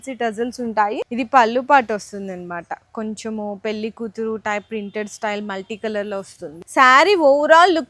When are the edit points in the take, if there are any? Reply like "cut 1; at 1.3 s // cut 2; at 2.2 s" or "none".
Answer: cut 1; at 1.1 s // cut 2; at 6.5 s

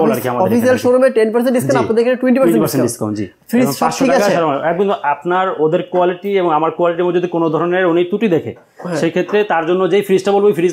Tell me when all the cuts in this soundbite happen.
none

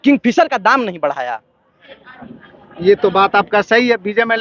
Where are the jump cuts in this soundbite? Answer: none

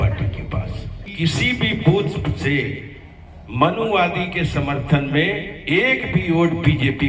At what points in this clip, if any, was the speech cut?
cut 1; at 1.1 s

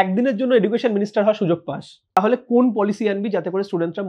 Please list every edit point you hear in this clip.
cut 1; at 2.2 s

